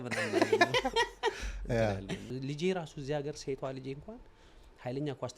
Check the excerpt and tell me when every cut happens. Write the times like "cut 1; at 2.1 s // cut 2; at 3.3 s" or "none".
cut 1; at 2.3 s